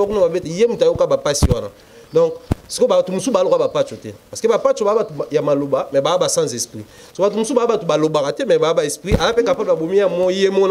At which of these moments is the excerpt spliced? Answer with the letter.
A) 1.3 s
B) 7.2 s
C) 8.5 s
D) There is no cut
D